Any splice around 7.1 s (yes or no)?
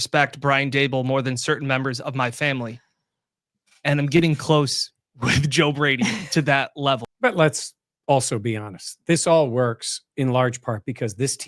yes